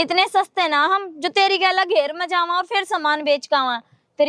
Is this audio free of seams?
yes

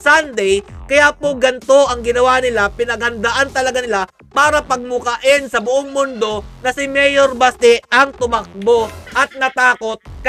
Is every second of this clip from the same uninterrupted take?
yes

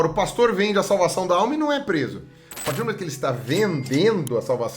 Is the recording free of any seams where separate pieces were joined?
no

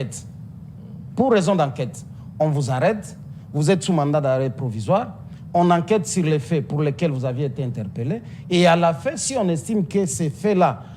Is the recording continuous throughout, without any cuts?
yes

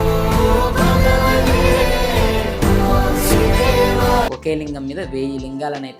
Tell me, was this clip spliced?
yes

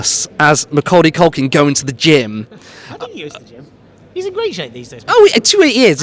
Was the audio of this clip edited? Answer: no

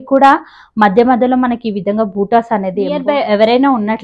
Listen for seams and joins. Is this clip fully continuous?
no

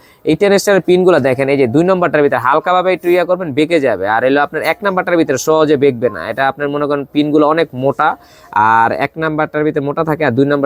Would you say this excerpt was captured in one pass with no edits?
yes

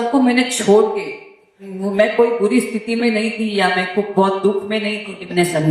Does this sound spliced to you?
no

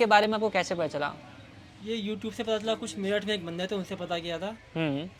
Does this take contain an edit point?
no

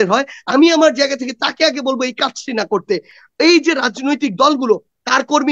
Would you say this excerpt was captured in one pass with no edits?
yes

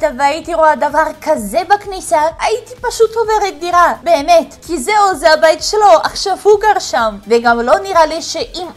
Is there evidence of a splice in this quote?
no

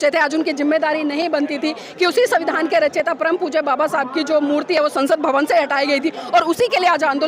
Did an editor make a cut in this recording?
no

